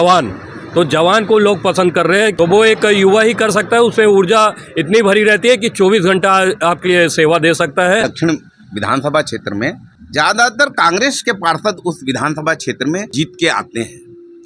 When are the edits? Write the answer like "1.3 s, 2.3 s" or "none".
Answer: 2.3 s, 8.1 s, 9.9 s, 13.1 s